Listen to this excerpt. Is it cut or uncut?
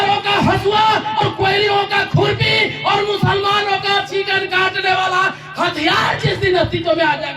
cut